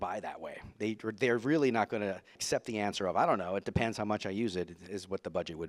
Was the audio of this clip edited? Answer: yes; 1 cut; at 2.4 s

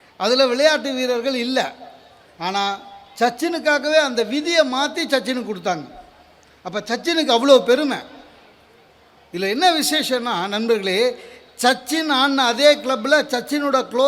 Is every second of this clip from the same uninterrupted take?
yes; 0 cuts

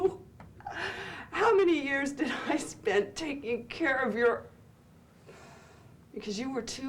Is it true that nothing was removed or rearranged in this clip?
yes; 0 cuts

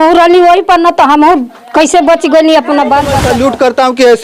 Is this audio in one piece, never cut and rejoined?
no; 1 cut; at 3.2 s

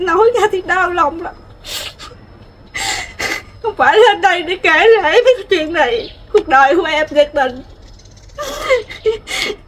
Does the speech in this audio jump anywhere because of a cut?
no; 0 cuts

